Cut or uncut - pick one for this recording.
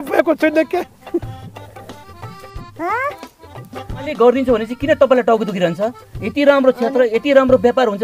cut